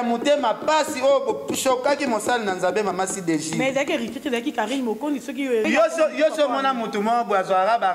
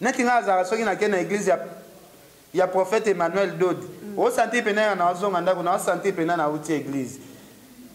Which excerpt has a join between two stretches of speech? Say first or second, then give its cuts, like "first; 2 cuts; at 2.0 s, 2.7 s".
first; 1 cut; at 5.7 s